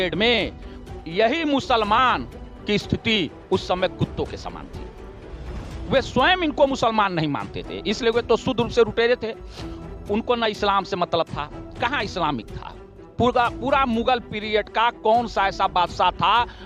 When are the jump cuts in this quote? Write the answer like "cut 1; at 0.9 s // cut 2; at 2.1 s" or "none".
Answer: none